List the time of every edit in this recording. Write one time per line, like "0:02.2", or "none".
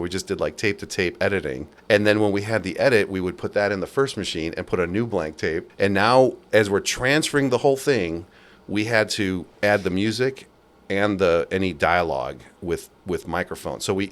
0:01.7
0:05.7